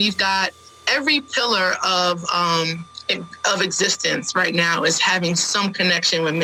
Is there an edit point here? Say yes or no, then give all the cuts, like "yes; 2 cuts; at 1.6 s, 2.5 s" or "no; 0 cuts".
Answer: no; 0 cuts